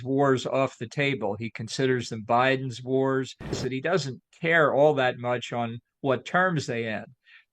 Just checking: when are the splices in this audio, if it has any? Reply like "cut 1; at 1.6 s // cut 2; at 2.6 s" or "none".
cut 1; at 3.6 s